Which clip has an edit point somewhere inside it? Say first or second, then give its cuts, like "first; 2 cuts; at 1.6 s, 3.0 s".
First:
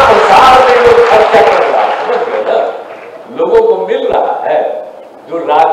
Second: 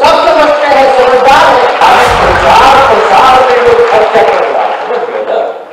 second; 1 cut; at 1.8 s